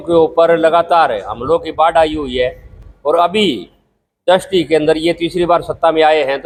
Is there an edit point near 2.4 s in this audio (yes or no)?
no